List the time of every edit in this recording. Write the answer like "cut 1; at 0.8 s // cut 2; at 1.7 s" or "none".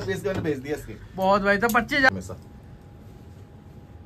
cut 1; at 2.1 s